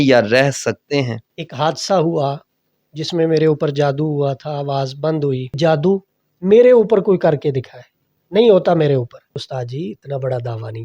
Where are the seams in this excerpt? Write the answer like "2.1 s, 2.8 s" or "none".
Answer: 1.2 s, 5.6 s, 9.4 s